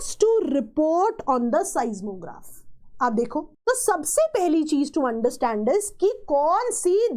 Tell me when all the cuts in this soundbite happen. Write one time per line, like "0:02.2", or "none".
0:03.5